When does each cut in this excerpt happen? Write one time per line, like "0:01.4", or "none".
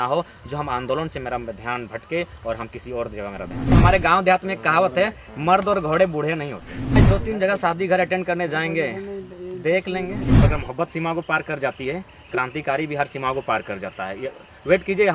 0:03.7
0:07.0
0:10.3